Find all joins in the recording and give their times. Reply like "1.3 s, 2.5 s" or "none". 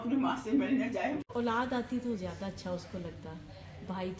1.2 s